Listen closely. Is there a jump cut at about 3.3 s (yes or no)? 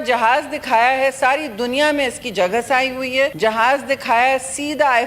yes